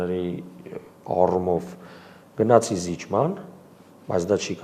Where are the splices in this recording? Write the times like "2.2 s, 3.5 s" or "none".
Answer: none